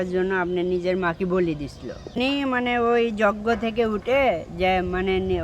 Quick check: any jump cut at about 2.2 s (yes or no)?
yes